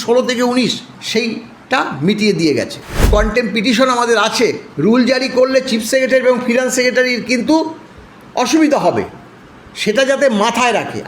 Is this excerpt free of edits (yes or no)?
no